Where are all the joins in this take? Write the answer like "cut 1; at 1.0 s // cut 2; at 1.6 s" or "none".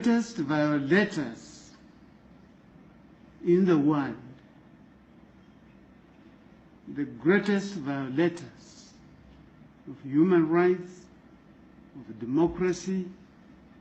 cut 1; at 2.7 s